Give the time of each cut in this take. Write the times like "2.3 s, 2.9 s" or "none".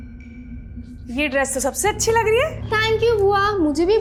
none